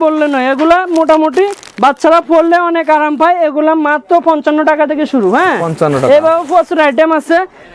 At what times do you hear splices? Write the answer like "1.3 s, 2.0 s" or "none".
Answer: none

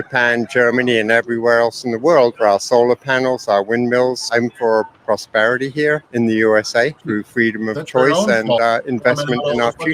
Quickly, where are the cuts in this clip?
none

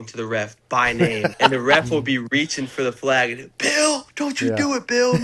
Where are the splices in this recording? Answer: 1.3 s, 4.1 s

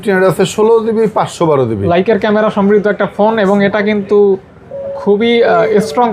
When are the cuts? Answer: none

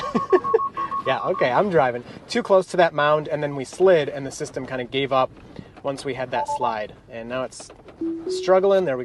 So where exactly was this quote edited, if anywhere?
none

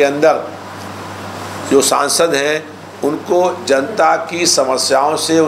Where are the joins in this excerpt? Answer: none

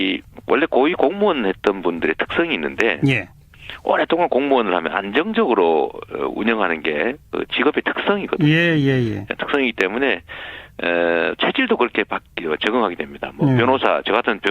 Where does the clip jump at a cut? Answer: 8.8 s

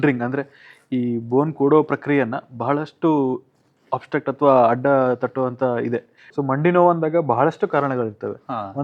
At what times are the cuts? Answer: 6.2 s

